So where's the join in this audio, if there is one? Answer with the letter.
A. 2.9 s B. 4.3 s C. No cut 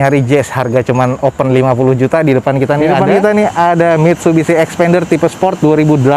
A